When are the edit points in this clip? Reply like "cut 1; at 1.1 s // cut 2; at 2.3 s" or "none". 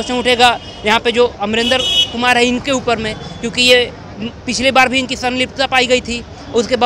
none